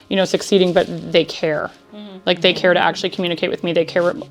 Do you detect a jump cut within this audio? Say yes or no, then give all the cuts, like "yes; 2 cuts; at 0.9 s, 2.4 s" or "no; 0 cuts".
no; 0 cuts